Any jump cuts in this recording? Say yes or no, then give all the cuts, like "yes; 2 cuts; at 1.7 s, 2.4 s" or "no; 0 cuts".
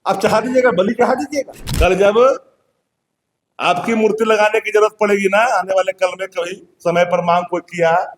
yes; 1 cut; at 1.6 s